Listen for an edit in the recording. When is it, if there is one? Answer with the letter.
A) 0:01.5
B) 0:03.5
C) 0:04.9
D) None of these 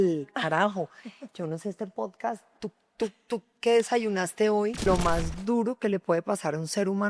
C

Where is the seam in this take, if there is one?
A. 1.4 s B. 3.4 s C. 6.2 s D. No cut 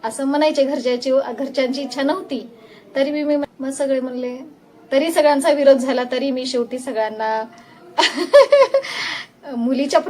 B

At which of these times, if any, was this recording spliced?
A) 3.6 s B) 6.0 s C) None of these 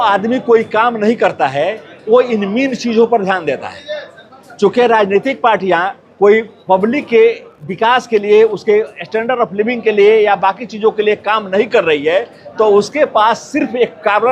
C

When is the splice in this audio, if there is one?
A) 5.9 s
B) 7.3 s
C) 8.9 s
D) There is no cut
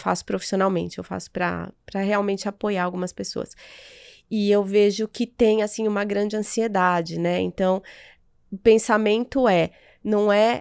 D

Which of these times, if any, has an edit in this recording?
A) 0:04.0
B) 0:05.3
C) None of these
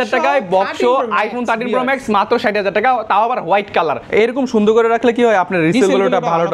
A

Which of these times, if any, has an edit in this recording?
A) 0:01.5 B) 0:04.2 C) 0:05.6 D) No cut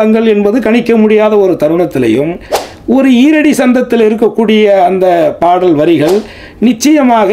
D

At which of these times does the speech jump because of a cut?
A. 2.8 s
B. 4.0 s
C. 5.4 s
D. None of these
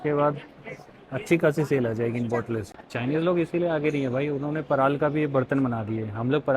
A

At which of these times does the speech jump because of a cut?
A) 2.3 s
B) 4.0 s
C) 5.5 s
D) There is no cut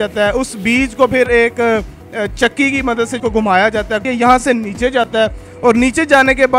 B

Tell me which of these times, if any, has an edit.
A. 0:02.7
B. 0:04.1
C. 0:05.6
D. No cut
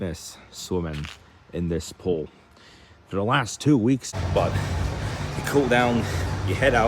B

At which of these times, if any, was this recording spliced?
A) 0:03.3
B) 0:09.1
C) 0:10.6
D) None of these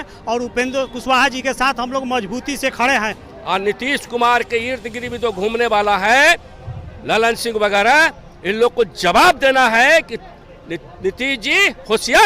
A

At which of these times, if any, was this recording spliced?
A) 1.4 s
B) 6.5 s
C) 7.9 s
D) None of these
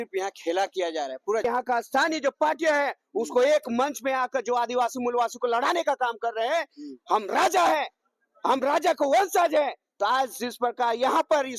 A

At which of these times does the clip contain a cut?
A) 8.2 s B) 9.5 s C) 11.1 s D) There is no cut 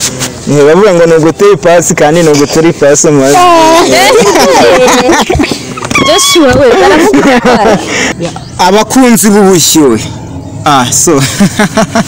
A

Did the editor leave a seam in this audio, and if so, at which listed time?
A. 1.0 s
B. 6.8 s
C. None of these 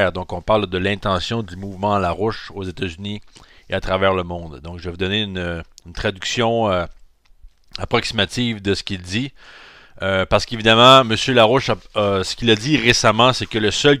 A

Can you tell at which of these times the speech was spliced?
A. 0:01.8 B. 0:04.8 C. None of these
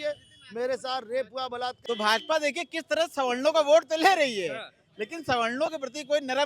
A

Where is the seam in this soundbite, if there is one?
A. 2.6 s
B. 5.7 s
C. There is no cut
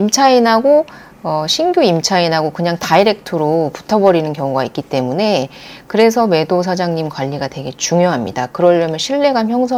C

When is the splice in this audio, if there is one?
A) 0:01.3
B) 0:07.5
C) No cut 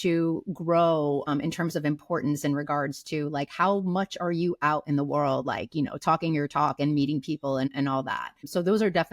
A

